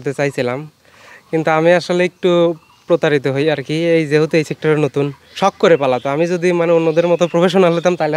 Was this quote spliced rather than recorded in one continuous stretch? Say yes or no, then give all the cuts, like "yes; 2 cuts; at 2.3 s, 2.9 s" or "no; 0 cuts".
no; 0 cuts